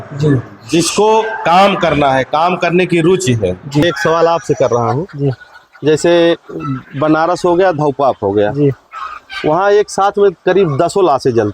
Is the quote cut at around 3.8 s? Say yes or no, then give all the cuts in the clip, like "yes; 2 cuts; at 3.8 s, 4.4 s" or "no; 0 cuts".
yes; 1 cut; at 3.8 s